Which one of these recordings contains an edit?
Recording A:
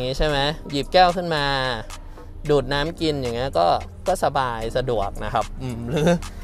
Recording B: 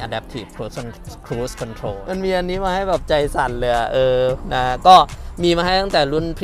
B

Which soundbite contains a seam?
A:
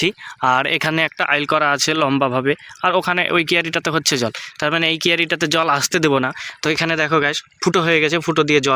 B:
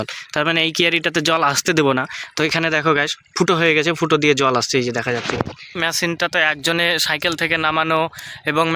B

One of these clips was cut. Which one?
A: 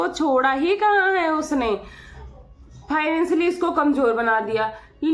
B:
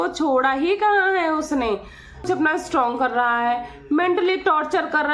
B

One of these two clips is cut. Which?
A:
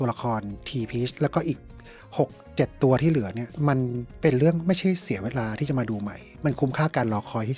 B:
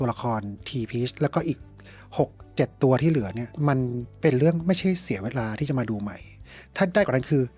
A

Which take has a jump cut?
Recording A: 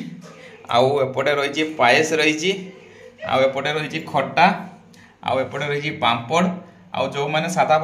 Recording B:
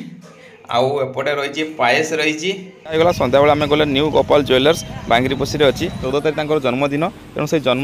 B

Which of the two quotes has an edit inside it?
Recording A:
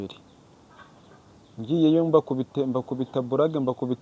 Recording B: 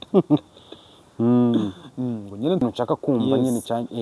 B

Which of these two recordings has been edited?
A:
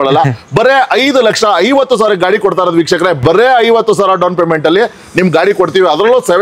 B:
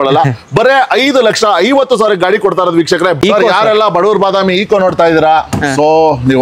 B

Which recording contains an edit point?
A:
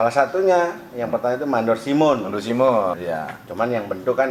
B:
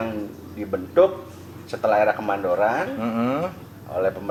A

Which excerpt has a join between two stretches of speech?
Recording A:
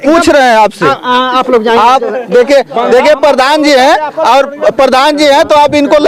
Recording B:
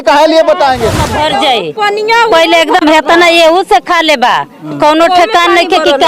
B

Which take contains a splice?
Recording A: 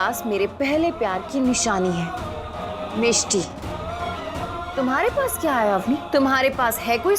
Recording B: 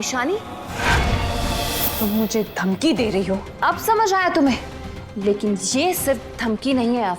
B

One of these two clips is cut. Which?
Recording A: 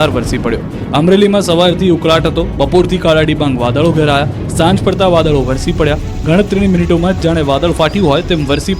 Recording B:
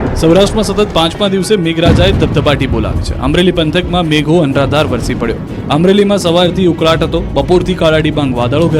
B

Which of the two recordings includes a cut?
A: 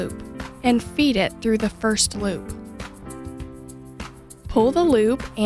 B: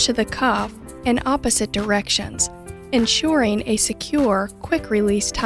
A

